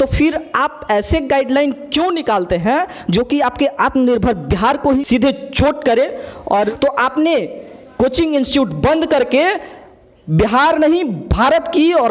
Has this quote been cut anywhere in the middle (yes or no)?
yes